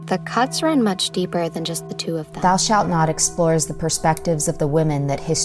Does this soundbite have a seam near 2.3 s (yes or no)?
yes